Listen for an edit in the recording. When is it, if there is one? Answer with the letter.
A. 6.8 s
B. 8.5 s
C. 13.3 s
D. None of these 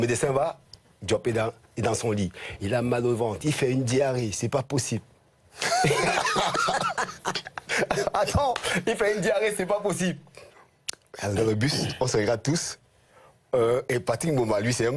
B